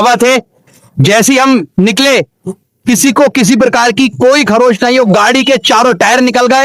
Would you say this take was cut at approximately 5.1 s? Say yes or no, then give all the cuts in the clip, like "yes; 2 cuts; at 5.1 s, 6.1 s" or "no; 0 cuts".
no; 0 cuts